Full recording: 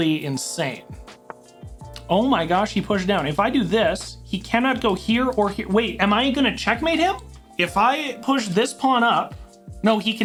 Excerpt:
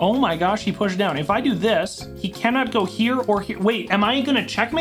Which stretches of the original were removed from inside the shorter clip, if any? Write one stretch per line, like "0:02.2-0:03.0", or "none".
none